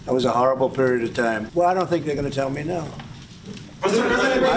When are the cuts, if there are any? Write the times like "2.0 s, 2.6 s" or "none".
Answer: 1.4 s